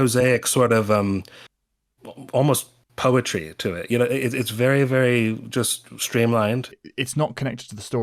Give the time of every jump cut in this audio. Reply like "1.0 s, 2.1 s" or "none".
6.7 s